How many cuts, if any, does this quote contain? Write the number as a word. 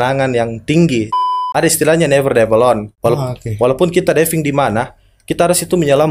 two